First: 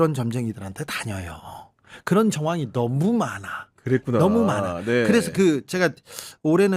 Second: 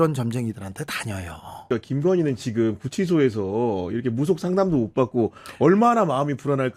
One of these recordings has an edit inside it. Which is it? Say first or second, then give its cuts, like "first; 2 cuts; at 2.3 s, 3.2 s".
second; 1 cut; at 1.6 s